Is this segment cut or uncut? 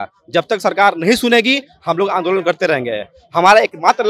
uncut